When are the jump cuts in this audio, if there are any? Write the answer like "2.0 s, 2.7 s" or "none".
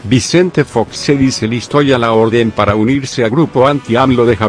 none